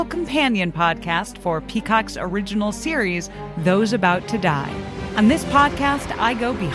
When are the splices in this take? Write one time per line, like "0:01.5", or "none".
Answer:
0:05.0